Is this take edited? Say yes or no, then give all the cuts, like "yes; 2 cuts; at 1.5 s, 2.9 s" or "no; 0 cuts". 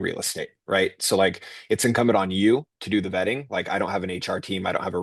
no; 0 cuts